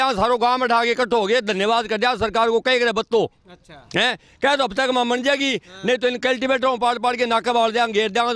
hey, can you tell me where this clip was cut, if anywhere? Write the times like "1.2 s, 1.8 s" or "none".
none